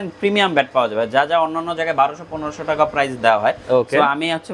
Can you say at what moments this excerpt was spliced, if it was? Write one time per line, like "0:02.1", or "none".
none

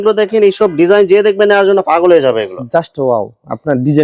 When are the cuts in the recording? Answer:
none

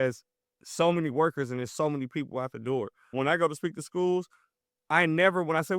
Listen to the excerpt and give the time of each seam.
0:03.1

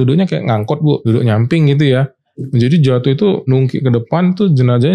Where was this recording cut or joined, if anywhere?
0:01.0
0:03.5

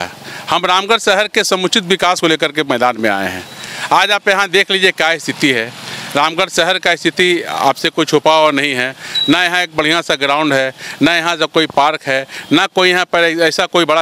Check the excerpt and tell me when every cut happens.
none

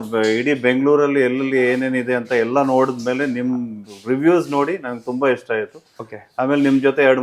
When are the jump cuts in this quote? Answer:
none

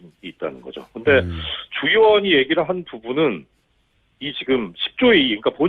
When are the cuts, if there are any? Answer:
0:02.8

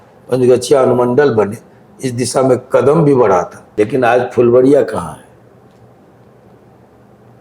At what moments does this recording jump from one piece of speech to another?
0:03.6

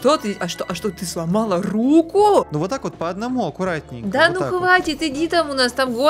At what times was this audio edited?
0:02.5

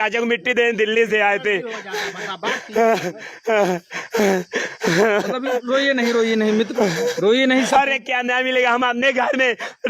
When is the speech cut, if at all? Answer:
0:07.7

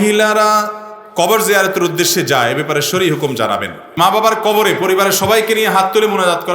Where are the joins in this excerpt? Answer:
0:03.9

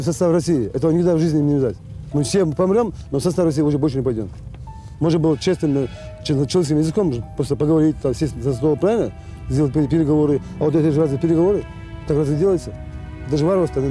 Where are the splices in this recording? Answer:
none

